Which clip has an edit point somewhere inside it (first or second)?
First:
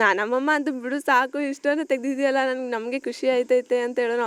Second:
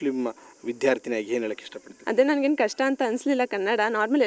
second